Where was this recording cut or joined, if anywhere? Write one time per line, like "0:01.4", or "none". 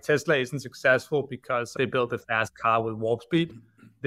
0:01.7